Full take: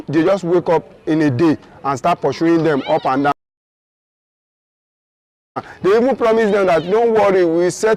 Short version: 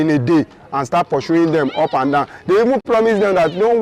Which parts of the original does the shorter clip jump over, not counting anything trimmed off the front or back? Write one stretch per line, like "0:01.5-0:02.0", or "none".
0:04.0-0:06.2